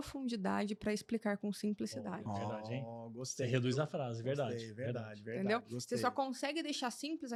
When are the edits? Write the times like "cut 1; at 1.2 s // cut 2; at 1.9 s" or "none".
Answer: none